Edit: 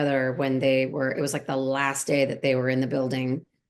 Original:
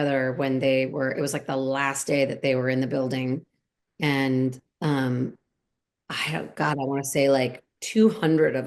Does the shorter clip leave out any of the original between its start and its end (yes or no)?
no